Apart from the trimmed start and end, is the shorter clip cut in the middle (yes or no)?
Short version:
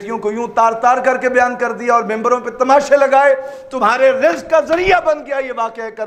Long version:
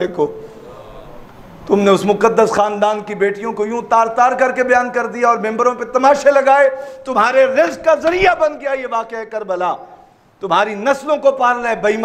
no